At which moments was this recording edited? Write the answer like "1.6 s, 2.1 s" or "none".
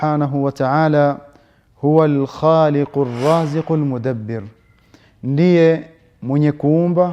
none